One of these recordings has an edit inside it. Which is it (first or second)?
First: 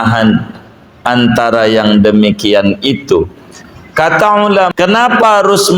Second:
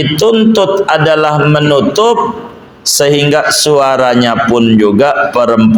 first